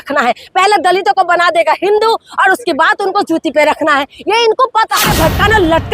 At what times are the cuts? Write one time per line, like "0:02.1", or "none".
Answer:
0:05.0